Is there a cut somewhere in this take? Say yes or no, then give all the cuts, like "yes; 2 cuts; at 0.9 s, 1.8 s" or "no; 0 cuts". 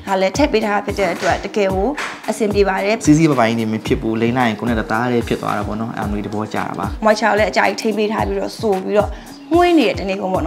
yes; 2 cuts; at 3.0 s, 6.9 s